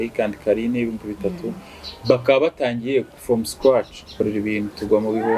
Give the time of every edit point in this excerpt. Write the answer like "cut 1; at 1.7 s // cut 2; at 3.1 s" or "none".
cut 1; at 4.1 s